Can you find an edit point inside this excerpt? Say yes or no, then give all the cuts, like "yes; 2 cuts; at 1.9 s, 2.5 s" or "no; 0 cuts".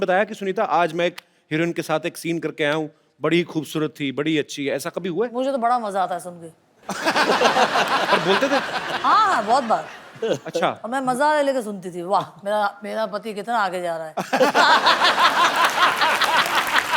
no; 0 cuts